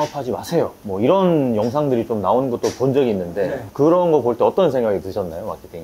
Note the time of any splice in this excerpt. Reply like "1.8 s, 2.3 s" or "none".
3.6 s